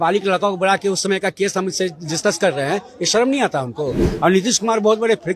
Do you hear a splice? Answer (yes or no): yes